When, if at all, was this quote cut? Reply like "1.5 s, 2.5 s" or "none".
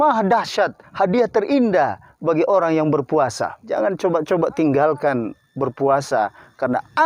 3.5 s